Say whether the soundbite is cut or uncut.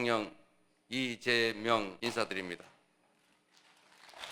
cut